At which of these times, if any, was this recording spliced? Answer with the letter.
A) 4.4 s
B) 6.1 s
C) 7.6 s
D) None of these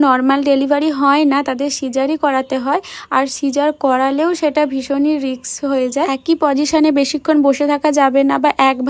B